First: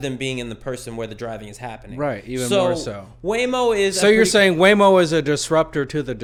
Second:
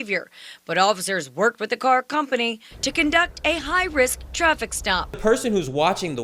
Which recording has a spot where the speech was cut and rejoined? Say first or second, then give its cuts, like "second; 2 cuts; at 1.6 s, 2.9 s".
second; 1 cut; at 5.1 s